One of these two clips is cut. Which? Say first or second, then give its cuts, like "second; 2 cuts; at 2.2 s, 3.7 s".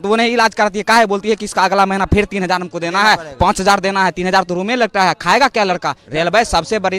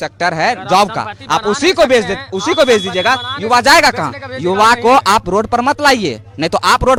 first; 1 cut; at 6.0 s